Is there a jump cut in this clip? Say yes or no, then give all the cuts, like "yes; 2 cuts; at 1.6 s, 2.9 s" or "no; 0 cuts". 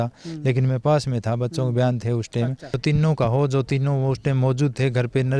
yes; 1 cut; at 2.8 s